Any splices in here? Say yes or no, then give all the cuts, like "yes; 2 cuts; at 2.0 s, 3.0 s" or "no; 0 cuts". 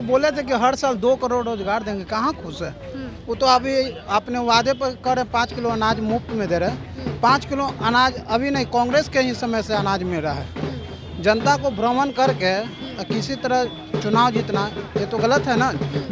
no; 0 cuts